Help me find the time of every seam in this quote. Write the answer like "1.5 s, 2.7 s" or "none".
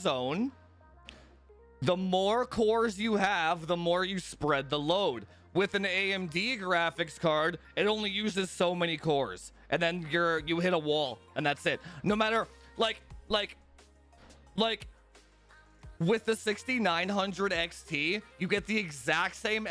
none